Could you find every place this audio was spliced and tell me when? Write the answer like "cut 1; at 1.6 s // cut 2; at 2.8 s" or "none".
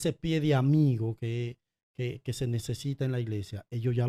none